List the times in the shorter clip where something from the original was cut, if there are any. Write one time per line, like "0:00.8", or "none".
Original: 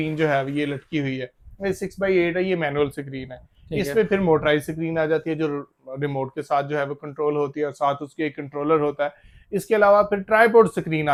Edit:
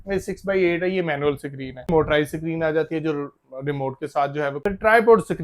0:01.9
0:04.6